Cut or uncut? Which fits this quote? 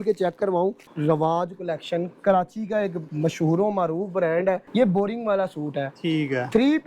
cut